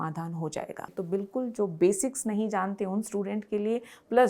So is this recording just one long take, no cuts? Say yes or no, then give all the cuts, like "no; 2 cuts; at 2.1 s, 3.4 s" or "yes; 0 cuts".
no; 1 cut; at 0.9 s